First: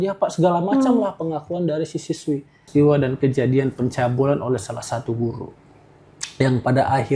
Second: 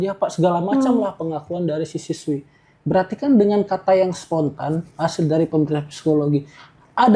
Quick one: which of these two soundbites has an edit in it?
first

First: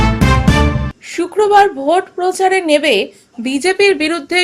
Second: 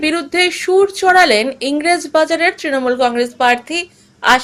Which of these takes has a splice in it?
first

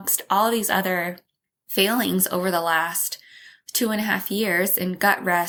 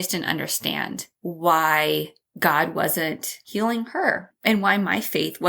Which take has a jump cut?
second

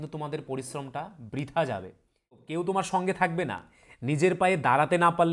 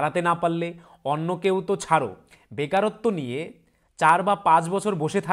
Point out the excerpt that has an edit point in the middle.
first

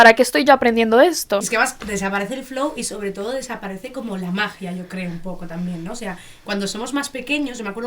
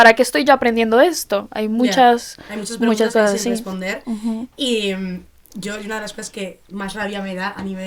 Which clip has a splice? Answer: first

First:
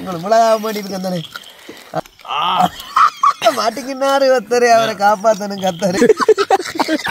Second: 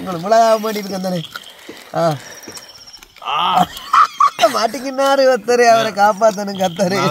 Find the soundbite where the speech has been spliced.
first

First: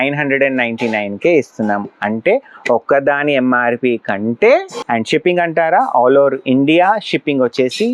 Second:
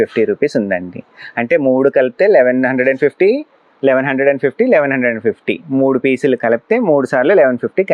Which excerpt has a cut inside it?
first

